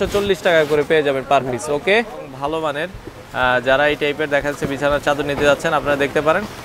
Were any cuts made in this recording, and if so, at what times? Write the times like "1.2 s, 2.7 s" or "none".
2.2 s